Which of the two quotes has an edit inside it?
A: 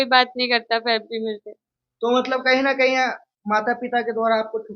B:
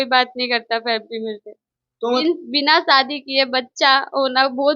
B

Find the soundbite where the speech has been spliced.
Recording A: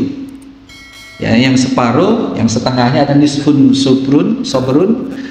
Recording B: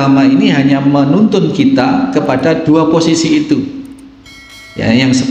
B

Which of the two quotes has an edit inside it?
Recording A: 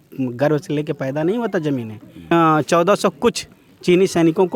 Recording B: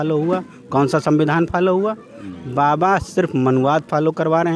A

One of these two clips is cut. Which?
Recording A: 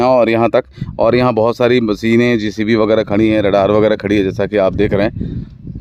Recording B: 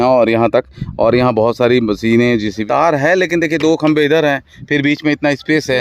B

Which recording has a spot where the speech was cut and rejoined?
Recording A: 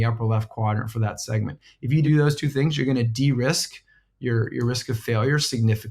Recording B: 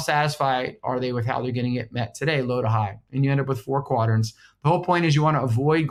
A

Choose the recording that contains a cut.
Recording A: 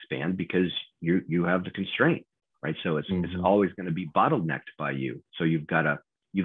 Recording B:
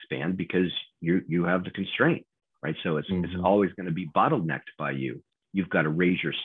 B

